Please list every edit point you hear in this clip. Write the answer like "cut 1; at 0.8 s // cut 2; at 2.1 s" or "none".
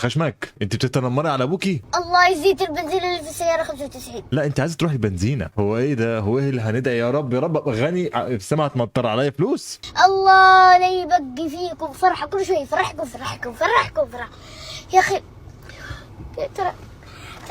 none